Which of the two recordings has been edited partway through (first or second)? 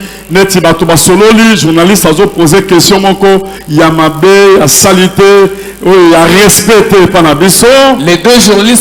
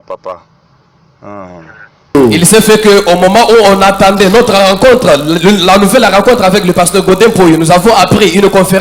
second